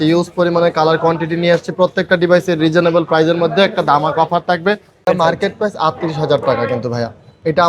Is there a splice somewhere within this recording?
yes; 1 cut; at 5.1 s

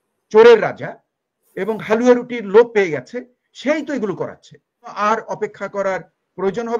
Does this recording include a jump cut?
yes; 1 cut; at 4.9 s

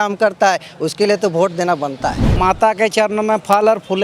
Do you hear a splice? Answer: yes; 1 cut; at 2.2 s

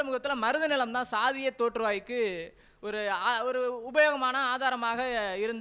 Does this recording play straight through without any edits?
yes; 0 cuts

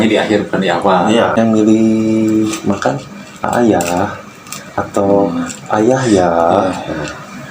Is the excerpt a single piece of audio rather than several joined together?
no; 1 cut; at 1.4 s

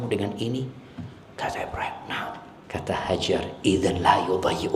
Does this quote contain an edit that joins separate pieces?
yes; 1 cut; at 2.5 s

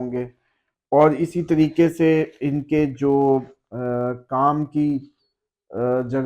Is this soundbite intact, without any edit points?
yes; 0 cuts

